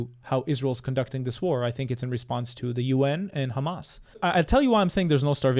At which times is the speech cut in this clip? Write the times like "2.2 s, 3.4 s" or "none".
4.2 s